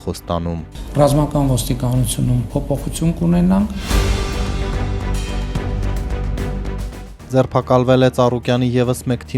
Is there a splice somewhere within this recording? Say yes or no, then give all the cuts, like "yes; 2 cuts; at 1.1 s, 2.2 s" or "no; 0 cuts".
yes; 1 cut; at 3.8 s